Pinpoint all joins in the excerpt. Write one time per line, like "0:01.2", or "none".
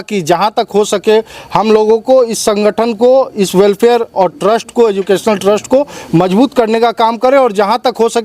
none